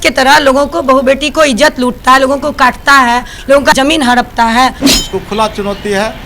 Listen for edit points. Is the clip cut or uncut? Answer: cut